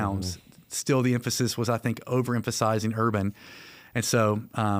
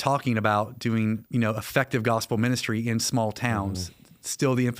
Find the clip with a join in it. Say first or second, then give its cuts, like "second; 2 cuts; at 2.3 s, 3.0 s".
second; 1 cut; at 1.2 s